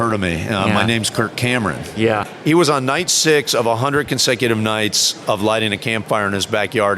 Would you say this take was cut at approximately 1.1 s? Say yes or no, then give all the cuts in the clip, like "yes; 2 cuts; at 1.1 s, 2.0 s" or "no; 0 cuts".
no; 1 cut; at 2.3 s